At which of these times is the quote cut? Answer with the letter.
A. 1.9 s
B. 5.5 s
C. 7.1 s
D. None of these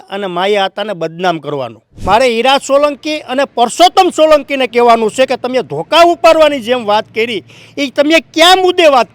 A